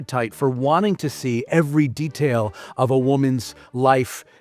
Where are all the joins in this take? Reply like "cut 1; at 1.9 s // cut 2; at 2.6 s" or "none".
none